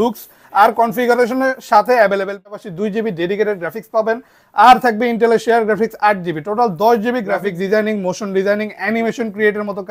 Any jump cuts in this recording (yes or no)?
yes